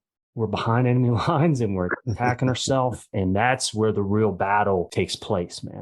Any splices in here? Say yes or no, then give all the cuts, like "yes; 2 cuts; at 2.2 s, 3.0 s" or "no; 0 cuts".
yes; 2 cuts; at 3.1 s, 4.9 s